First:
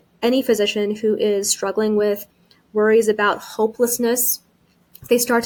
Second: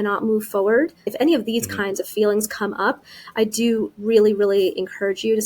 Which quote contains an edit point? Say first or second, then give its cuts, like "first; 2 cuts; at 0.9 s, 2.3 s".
second; 1 cut; at 1.1 s